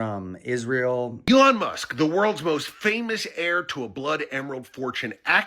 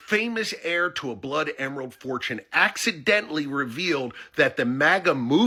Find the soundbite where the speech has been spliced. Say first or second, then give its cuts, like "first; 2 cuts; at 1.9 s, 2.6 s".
first; 1 cut; at 1.2 s